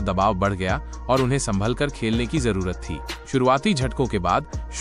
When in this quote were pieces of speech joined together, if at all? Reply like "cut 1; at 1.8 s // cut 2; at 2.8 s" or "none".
cut 1; at 3.1 s